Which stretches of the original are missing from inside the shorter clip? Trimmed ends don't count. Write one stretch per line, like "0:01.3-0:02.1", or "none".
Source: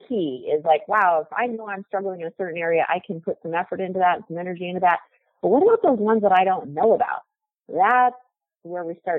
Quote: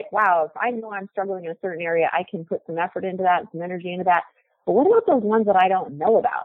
none